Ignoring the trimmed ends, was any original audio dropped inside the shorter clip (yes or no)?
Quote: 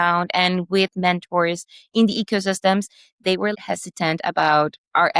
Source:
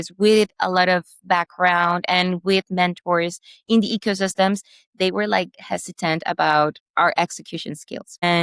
yes